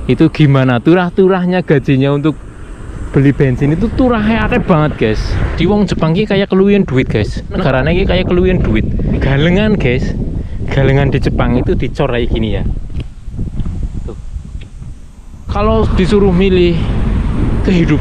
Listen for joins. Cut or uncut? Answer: cut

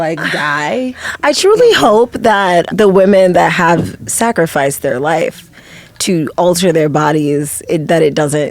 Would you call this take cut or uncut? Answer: cut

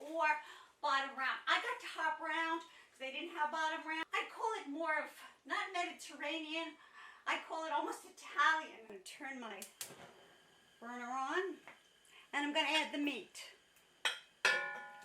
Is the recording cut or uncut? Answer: cut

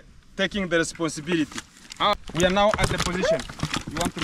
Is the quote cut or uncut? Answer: cut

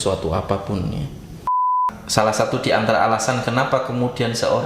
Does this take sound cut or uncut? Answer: cut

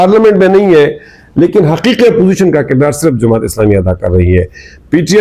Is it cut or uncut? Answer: uncut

